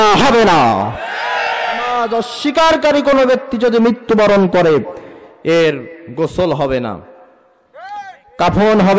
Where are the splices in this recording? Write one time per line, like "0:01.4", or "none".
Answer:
0:01.9